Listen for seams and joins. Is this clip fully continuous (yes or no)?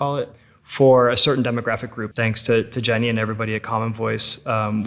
no